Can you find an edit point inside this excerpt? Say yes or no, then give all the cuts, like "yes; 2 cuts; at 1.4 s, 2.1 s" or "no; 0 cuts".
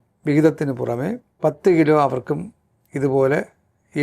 yes; 1 cut; at 1.2 s